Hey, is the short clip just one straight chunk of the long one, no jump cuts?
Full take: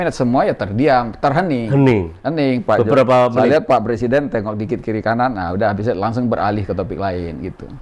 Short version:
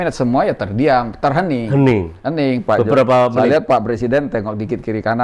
yes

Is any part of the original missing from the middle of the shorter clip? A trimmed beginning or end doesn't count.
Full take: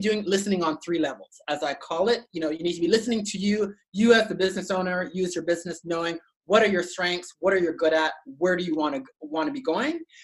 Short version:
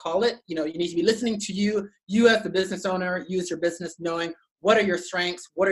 no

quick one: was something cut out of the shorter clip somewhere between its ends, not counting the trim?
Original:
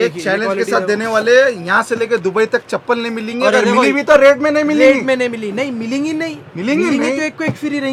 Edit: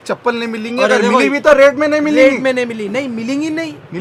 no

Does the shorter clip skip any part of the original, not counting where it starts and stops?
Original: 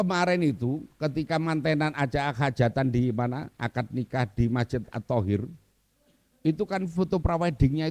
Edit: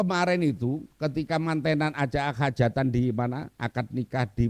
no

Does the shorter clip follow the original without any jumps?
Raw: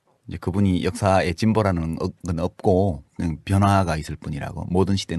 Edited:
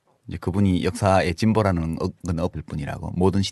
no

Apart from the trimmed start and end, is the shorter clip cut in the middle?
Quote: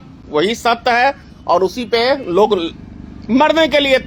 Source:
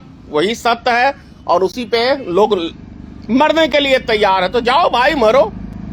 no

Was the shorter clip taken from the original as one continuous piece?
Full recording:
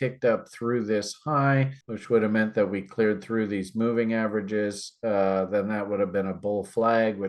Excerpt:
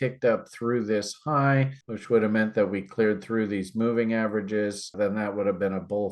no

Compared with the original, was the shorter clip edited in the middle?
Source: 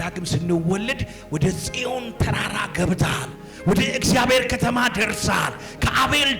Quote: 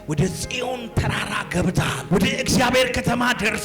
yes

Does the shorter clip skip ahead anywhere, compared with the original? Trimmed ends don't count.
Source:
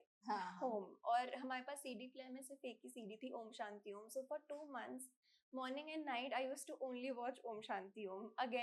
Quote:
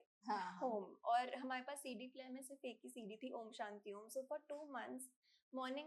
no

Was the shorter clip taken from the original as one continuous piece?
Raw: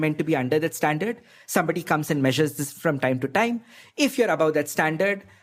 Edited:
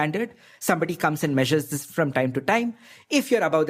yes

